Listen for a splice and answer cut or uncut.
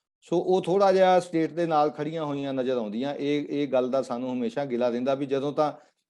uncut